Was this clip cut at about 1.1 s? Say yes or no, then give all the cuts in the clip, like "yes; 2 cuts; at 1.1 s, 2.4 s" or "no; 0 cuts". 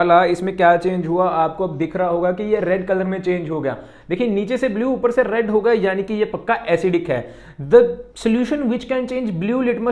no; 0 cuts